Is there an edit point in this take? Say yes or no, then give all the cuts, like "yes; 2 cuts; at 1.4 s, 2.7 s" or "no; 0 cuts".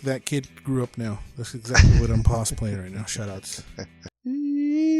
yes; 1 cut; at 4.0 s